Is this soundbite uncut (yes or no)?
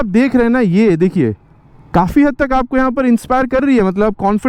yes